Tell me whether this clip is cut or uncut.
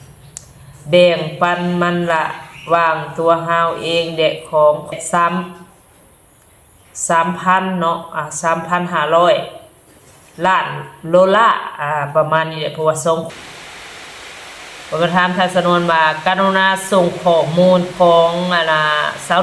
cut